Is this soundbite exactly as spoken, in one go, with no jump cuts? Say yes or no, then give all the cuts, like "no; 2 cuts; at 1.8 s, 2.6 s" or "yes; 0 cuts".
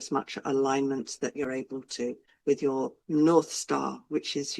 no; 1 cut; at 2.3 s